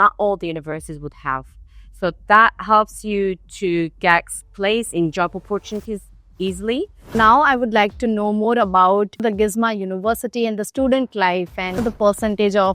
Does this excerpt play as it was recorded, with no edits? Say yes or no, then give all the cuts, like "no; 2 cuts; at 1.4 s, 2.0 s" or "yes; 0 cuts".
no; 2 cuts; at 7.1 s, 11.8 s